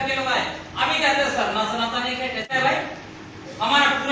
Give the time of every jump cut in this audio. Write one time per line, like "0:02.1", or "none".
0:02.5